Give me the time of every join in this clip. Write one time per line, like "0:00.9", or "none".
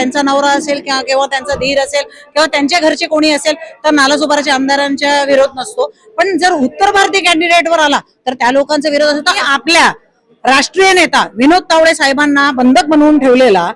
0:09.4

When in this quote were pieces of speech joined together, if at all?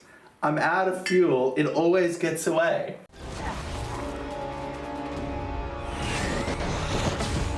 0:03.3

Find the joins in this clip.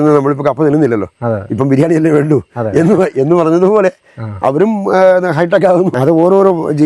0:05.9

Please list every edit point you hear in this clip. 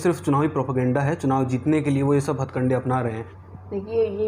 0:03.3

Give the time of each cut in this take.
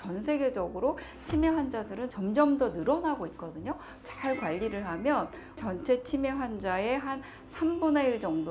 0:04.1
0:05.6

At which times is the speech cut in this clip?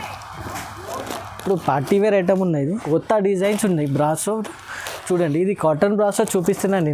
0:02.8

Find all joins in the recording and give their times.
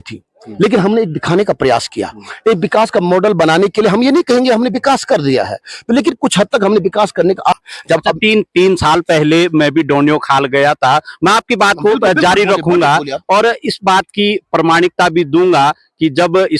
0:07.5

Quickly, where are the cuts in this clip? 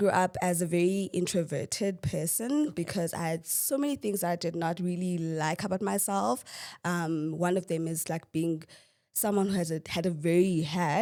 none

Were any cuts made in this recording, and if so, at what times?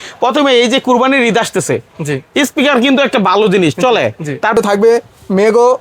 0:04.6

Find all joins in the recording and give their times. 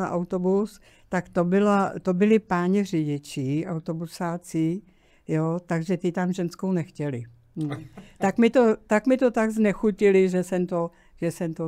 none

